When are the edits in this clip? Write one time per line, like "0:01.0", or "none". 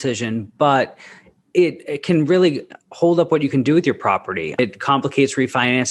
0:04.6